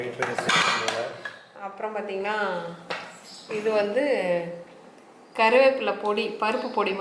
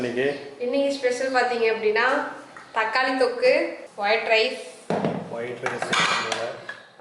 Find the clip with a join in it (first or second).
second